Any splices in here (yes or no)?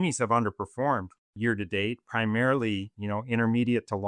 yes